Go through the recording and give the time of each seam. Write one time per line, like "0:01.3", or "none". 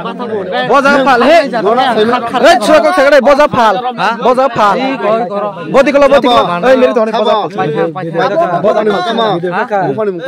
none